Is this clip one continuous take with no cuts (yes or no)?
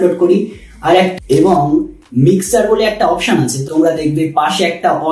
no